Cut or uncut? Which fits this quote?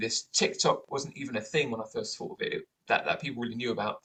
uncut